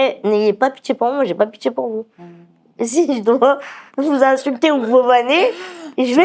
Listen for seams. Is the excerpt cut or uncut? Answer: uncut